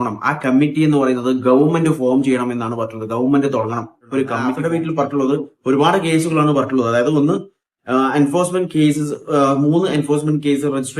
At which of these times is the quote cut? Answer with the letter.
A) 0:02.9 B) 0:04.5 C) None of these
B